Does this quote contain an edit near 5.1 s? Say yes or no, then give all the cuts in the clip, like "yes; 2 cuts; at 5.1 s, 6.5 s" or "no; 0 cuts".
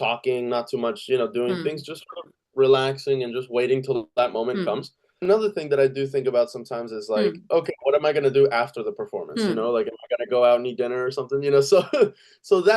yes; 1 cut; at 5.1 s